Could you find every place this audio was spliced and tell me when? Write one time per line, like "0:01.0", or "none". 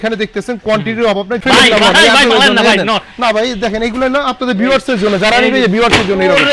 0:01.4